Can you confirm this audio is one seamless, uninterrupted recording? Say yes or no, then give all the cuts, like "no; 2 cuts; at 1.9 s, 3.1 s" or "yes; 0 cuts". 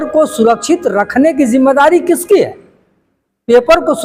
yes; 0 cuts